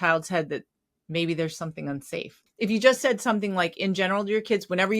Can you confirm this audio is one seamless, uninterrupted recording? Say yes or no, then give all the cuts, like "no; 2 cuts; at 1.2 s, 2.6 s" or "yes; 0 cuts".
no; 1 cut; at 2.3 s